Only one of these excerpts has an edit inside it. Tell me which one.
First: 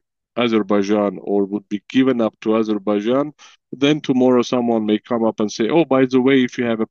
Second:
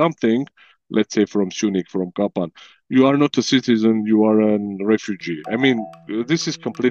second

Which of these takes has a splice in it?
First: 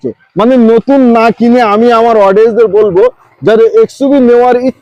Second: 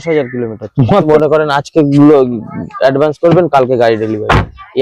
second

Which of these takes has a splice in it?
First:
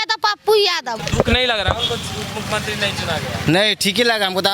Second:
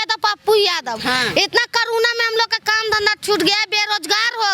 first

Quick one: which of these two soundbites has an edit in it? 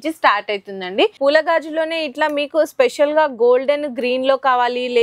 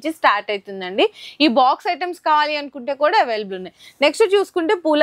first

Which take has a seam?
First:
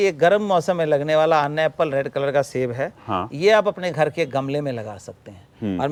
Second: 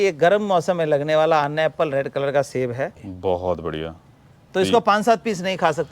second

